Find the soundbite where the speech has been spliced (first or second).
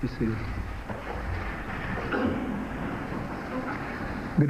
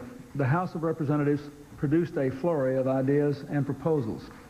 first